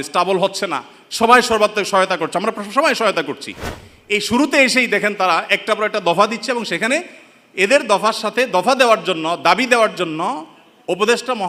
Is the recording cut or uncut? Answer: uncut